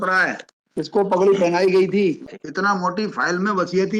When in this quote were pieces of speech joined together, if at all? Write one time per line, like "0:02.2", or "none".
0:01.0
0:02.2